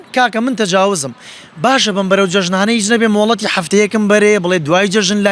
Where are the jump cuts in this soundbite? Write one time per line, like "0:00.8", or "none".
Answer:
none